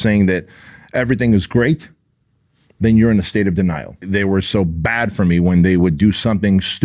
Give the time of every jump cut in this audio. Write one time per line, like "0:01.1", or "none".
0:04.0